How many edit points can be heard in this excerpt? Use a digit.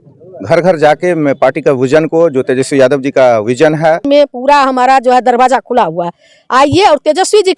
1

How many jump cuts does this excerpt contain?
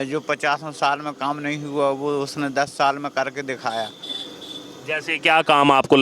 0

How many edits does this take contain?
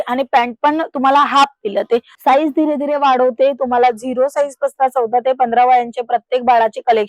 1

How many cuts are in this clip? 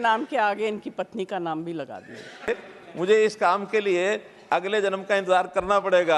1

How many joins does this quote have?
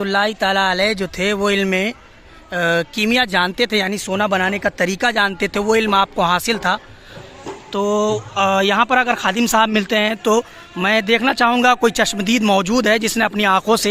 1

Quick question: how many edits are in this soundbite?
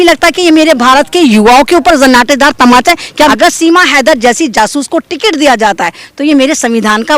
1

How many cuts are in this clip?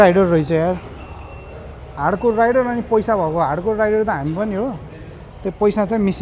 0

